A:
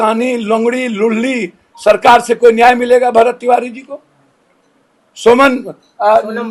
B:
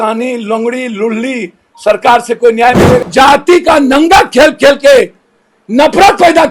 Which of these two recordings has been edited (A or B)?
B